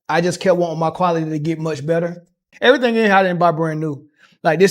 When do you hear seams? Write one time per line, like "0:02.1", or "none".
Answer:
0:02.4